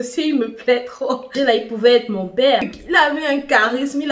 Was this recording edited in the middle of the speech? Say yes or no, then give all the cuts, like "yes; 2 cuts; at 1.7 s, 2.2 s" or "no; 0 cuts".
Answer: yes; 2 cuts; at 1.3 s, 2.8 s